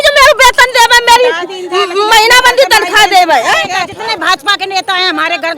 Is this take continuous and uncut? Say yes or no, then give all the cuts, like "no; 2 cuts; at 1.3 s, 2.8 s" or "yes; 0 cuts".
no; 1 cut; at 3.8 s